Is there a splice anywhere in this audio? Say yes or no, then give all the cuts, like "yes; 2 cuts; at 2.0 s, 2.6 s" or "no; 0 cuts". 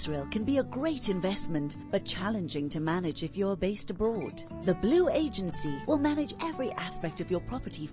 no; 0 cuts